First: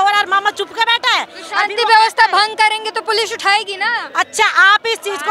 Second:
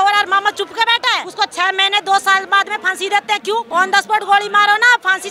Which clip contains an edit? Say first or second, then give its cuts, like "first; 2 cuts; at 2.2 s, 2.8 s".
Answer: second; 2 cuts; at 1.2 s, 3.7 s